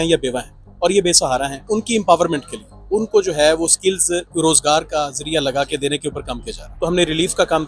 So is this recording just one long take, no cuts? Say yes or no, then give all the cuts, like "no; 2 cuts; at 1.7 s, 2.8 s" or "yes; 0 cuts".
no; 3 cuts; at 1.6 s, 4.3 s, 6.6 s